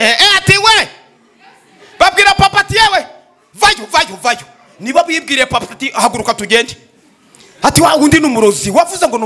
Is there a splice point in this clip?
no; 0 cuts

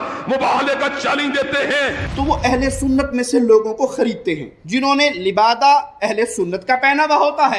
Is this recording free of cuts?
no; 1 cut; at 2.0 s

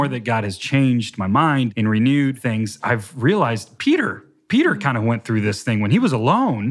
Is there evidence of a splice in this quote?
yes; 3 cuts; at 1.7 s, 2.7 s, 3.7 s

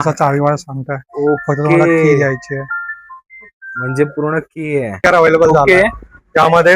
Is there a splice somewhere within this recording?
yes; 1 cut; at 5.0 s

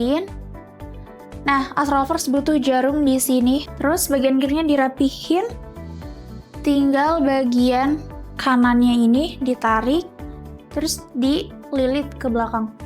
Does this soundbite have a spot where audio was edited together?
yes; 1 cut; at 3.7 s

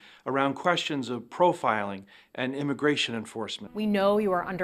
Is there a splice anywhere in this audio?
yes; 1 cut; at 3.6 s

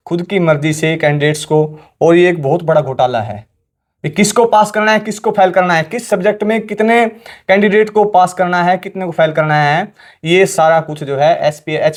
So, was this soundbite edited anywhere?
no; 0 cuts

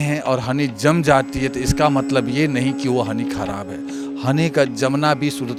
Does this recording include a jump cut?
no; 0 cuts

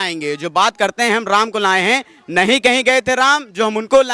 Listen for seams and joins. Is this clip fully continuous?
yes; 0 cuts

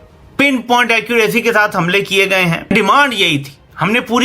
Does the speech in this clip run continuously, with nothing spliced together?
no; 1 cut; at 2.7 s

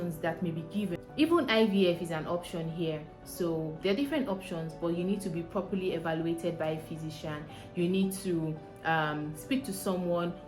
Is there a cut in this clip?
yes; 1 cut; at 1.0 s

